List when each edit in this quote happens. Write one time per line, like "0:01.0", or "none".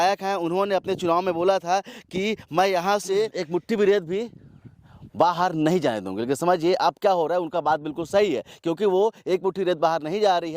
0:03.4